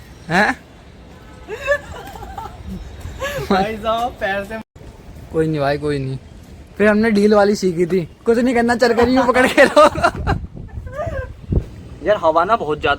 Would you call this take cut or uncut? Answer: cut